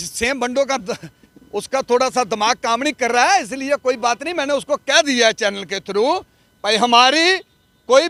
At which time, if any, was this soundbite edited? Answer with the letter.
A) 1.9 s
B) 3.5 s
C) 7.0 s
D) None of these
D